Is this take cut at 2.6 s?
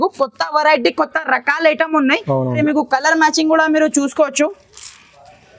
yes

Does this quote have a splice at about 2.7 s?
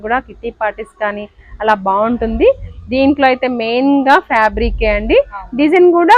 no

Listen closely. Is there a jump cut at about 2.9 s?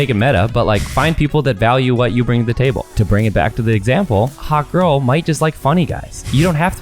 yes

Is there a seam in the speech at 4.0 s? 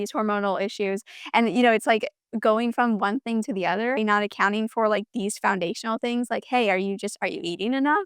yes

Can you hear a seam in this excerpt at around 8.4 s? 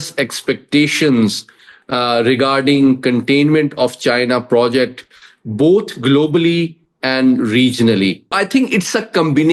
yes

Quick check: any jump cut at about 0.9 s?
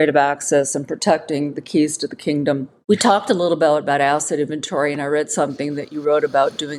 no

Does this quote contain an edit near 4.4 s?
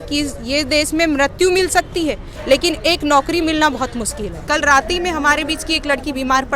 yes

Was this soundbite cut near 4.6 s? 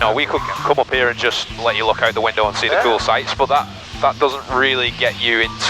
no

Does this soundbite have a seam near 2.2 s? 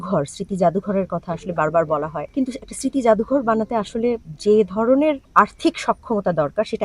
yes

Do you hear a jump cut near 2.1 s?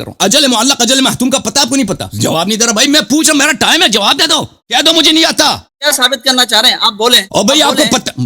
yes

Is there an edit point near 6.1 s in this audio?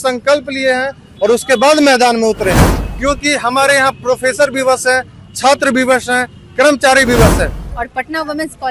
no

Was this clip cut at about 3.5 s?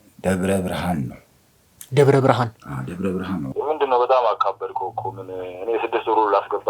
yes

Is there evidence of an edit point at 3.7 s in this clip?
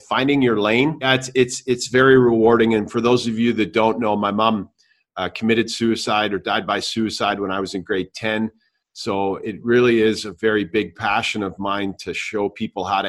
no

